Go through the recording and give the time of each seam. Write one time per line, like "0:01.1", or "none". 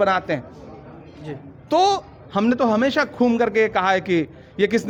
none